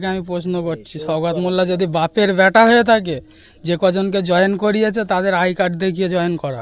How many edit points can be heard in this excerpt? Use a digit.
0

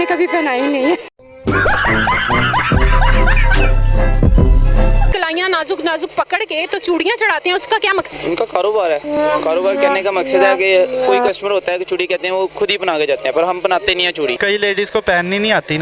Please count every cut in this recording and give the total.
3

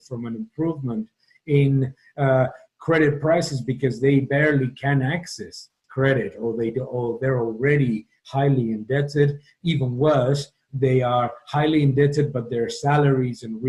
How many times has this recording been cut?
0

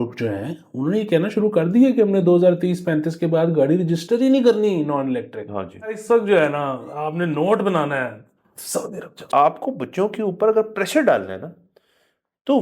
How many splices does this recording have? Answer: 2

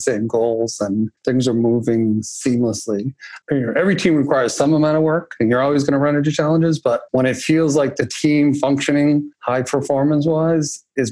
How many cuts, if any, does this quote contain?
5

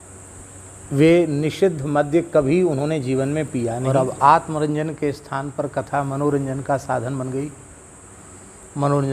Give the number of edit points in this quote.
1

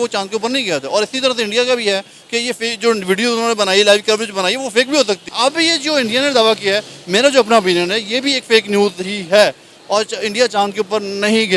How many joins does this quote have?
1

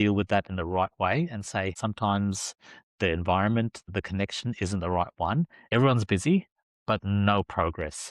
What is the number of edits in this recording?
2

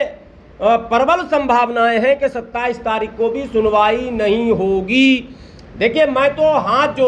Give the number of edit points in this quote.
0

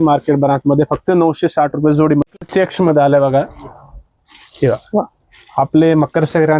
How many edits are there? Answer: 1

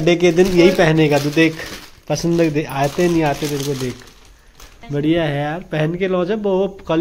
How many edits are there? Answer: 1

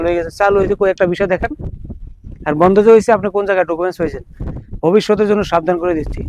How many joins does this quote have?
0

